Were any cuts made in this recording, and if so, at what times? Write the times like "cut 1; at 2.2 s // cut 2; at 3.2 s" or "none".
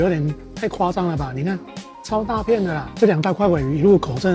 cut 1; at 2.9 s